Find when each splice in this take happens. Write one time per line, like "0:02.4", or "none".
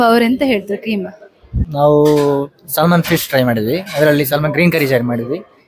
0:01.6